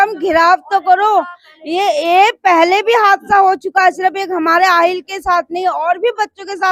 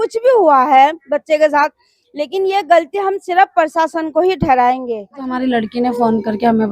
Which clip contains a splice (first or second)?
second